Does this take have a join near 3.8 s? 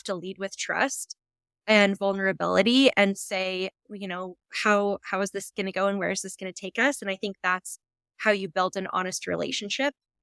no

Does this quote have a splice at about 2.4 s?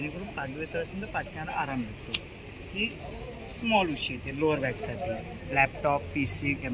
no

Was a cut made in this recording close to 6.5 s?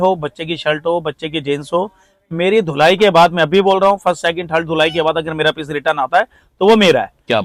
no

